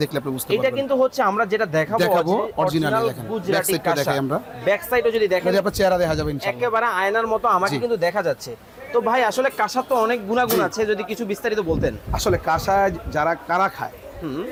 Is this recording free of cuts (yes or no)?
yes